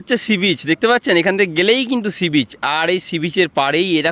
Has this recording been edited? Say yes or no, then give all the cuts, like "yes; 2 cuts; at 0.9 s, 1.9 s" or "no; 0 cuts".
no; 0 cuts